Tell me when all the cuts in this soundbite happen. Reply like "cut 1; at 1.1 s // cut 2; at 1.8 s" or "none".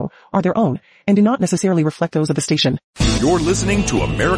cut 1; at 2.9 s